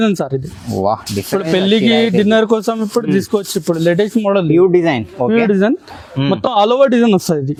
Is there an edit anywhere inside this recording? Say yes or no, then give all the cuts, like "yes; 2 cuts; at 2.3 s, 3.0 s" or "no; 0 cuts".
no; 0 cuts